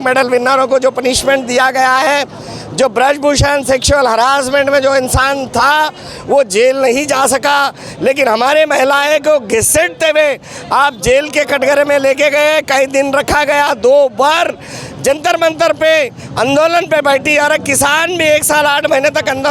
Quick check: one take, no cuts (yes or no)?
yes